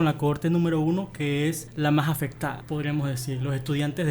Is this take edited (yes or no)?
yes